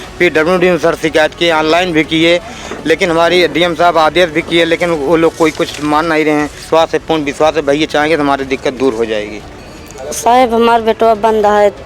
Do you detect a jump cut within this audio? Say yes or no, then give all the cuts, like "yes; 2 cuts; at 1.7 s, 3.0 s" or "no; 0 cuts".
yes; 2 cuts; at 6.6 s, 9.5 s